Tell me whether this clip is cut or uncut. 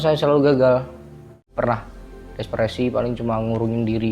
cut